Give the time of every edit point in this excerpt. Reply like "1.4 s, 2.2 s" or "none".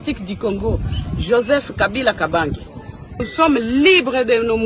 3.3 s